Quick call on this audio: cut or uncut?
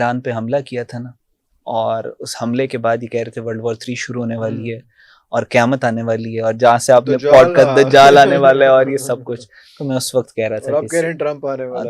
uncut